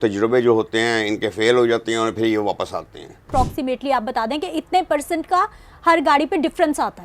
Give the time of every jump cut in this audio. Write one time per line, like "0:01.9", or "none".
0:03.2